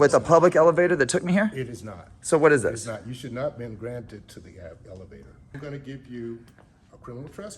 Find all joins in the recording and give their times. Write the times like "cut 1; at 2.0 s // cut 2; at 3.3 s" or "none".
cut 1; at 5.4 s